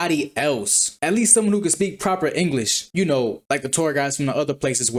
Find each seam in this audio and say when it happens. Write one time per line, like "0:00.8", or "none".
none